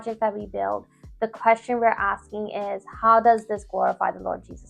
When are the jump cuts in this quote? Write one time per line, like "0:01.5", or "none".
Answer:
none